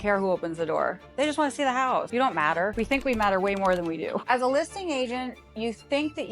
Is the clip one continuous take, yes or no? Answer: no